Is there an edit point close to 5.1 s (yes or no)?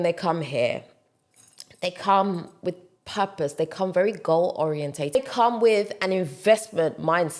yes